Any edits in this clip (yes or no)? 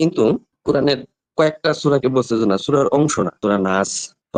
no